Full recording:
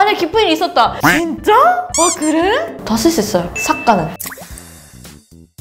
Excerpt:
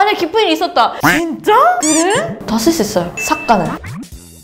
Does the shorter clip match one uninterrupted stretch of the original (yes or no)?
no